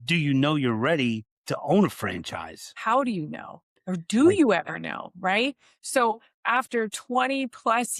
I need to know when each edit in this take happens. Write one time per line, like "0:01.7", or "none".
none